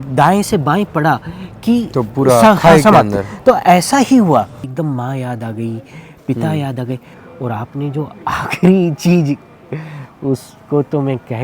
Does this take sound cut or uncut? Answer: cut